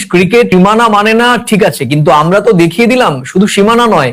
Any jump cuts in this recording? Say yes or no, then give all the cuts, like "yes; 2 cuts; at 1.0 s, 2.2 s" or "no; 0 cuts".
no; 0 cuts